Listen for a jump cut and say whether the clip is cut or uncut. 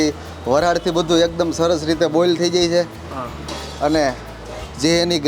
uncut